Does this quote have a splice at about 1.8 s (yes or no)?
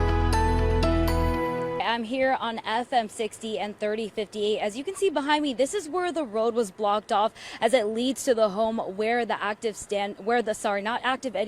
yes